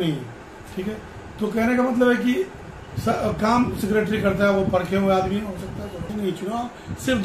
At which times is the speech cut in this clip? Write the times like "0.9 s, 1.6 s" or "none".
6.1 s